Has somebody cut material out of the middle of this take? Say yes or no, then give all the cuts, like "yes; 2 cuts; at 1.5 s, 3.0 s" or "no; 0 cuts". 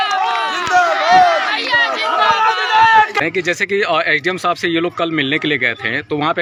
no; 0 cuts